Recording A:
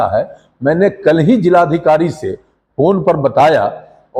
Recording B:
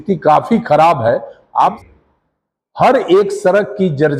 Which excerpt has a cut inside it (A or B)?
B